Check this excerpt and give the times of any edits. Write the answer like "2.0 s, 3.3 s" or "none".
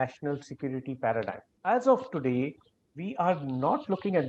1.4 s